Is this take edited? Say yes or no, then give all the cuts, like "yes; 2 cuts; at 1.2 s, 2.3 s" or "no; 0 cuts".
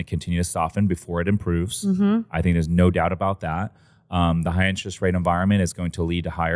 no; 0 cuts